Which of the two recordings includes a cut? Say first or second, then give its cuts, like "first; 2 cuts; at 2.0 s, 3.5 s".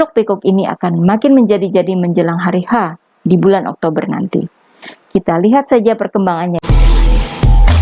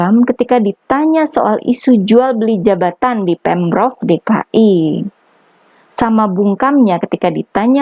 first; 1 cut; at 6.6 s